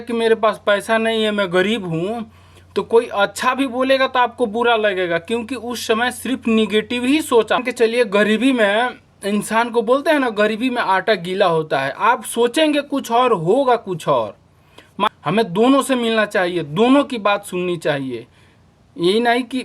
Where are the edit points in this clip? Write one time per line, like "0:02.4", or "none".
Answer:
0:07.6
0:15.1